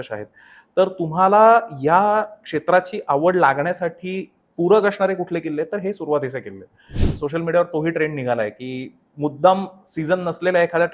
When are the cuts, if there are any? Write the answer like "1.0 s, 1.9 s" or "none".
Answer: 7.0 s